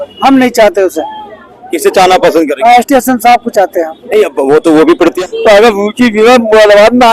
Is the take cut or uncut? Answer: cut